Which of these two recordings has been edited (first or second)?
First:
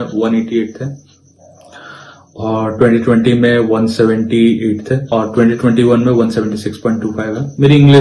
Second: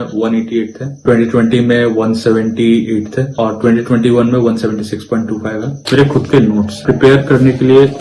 second